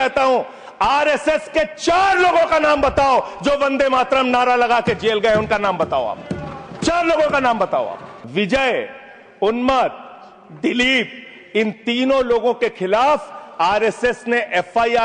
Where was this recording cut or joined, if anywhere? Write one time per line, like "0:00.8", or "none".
0:08.1